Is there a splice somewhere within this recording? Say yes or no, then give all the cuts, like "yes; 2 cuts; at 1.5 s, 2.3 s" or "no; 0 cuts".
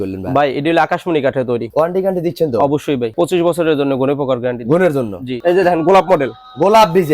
yes; 3 cuts; at 1.7 s, 3.1 s, 5.4 s